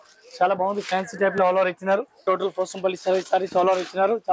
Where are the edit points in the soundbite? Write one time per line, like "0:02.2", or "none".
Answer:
0:02.2